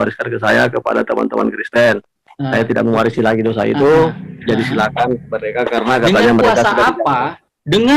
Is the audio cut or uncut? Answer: uncut